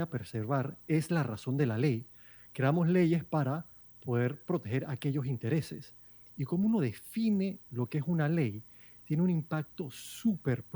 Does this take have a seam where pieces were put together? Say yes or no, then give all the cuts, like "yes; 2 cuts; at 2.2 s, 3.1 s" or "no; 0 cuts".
no; 0 cuts